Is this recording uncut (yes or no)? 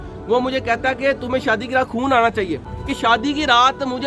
no